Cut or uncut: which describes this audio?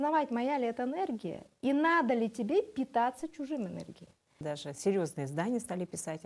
cut